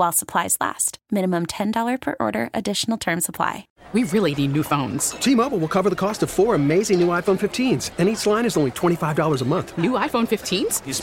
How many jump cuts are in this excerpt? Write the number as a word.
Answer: one